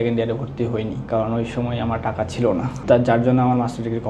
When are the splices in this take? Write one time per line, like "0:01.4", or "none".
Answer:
0:01.0
0:02.8